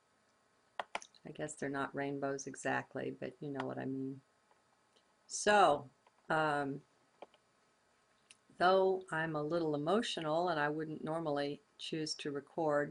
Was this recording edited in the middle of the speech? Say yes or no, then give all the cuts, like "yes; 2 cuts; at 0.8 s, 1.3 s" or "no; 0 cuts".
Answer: yes; 1 cut; at 8.7 s